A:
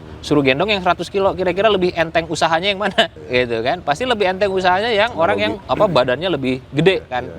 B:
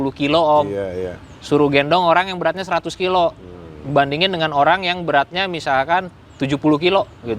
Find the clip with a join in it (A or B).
A